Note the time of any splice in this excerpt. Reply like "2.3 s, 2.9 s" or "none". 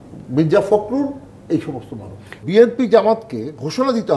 2.4 s